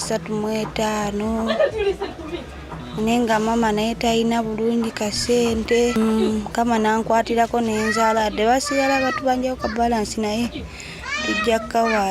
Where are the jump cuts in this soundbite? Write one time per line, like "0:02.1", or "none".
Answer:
0:06.0